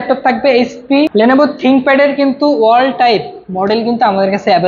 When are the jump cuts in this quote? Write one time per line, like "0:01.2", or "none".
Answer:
0:01.1